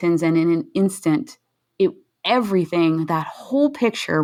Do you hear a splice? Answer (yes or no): no